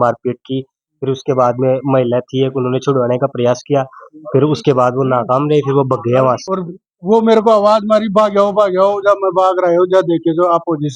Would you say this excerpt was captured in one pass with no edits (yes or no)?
no